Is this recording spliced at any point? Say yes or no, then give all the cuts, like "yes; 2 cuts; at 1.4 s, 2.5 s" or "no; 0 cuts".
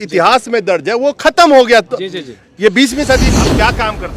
yes; 1 cut; at 3.3 s